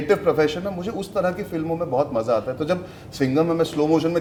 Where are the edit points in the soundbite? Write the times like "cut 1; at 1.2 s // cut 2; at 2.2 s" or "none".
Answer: none